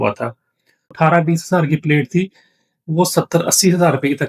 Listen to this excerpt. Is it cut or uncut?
cut